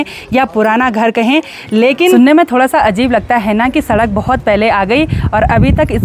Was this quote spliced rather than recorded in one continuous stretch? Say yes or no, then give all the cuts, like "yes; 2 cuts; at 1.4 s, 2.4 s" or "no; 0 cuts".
yes; 1 cut; at 2.1 s